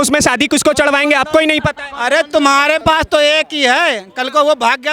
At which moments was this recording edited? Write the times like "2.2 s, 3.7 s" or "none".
2.8 s